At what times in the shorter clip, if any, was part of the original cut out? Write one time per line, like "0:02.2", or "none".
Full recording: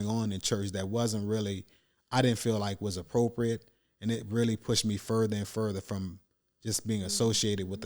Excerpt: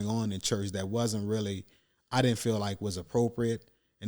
none